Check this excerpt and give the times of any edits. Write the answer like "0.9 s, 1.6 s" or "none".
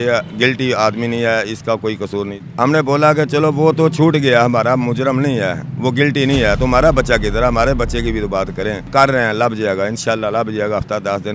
2.4 s, 8.8 s